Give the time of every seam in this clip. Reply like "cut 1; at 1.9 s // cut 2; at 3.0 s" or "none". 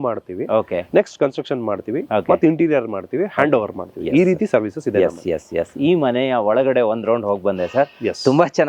none